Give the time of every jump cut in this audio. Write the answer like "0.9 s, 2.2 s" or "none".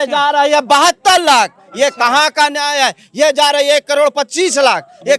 none